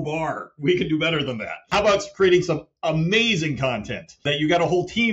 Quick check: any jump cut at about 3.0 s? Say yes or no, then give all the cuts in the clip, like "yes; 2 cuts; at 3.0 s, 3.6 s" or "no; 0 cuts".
no; 2 cuts; at 1.7 s, 4.3 s